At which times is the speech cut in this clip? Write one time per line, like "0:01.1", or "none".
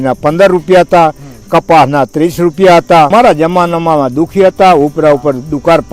0:03.1